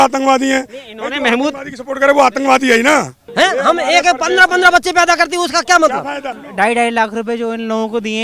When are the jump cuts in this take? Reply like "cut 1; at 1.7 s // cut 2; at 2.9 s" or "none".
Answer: cut 1; at 3.2 s // cut 2; at 6.4 s